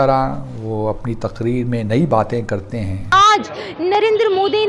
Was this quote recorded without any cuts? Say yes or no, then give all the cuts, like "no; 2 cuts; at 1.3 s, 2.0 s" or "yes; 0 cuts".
no; 1 cut; at 3.0 s